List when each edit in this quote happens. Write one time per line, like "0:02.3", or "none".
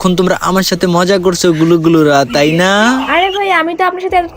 none